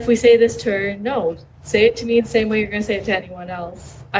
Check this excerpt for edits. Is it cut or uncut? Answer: uncut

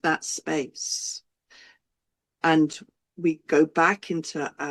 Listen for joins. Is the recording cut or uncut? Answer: uncut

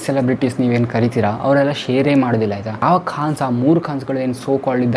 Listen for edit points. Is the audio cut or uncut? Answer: cut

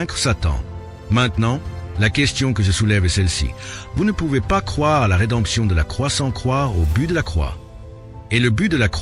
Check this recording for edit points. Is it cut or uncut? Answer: uncut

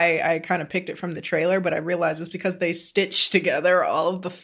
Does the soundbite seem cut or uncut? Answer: uncut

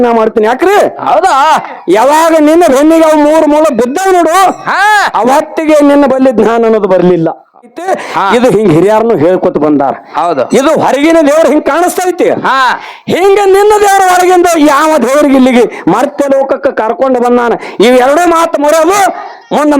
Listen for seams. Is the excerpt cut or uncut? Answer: cut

